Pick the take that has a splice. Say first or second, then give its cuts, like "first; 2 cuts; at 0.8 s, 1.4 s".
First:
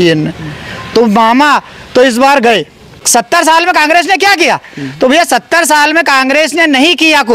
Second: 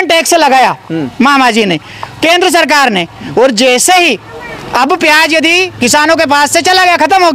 first; 1 cut; at 2.9 s